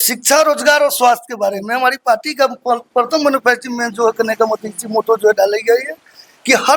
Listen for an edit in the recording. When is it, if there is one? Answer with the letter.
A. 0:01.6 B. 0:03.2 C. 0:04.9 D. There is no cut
D